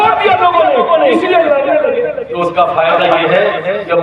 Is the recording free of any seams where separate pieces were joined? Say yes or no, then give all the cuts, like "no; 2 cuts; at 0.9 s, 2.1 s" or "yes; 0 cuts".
no; 1 cut; at 2.3 s